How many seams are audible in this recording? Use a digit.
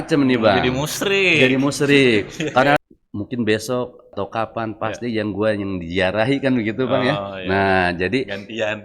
2